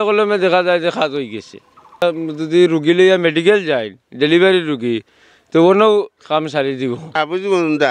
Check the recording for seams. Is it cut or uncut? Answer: cut